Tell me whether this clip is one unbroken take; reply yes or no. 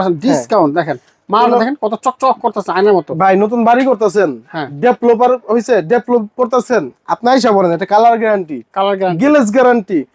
yes